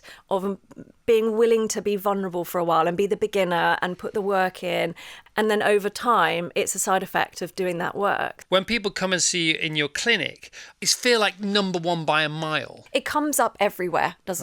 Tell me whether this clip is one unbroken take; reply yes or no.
no